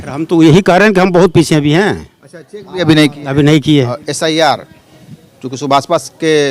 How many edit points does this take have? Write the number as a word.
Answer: one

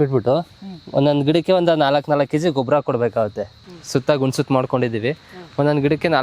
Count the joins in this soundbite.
zero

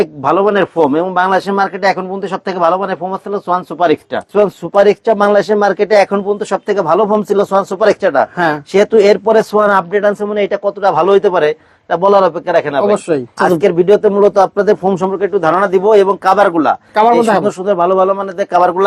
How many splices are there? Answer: two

